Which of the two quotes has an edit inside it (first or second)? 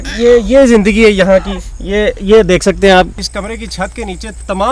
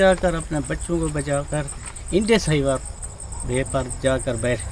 first